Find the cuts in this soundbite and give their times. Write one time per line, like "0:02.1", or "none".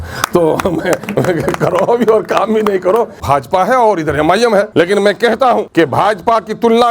0:03.2
0:04.7
0:05.7